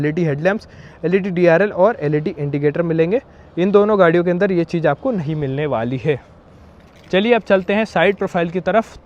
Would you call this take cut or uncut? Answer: uncut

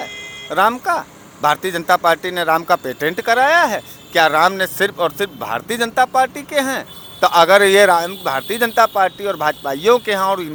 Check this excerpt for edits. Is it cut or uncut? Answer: uncut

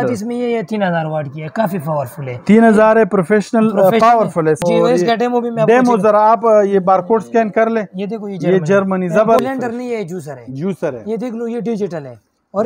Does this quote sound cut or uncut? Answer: cut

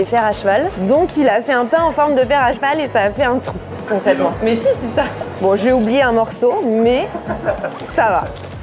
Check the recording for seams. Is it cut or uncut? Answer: uncut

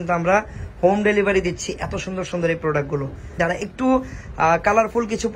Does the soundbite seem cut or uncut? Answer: cut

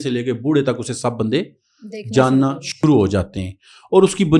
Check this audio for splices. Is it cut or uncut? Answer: uncut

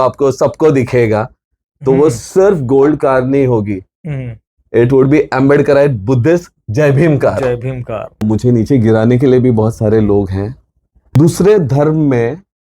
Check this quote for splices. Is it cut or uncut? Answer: cut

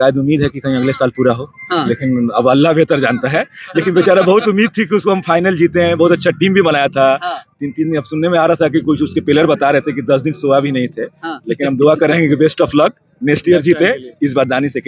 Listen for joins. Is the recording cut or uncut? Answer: uncut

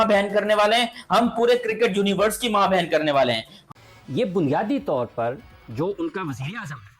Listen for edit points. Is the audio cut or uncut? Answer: cut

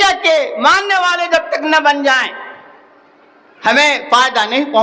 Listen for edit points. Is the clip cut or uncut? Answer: uncut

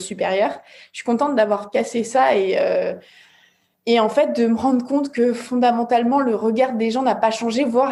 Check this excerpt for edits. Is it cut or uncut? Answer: uncut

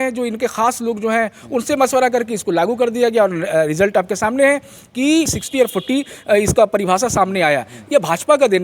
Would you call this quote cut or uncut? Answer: cut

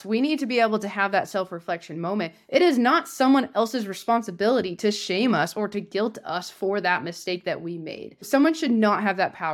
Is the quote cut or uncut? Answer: cut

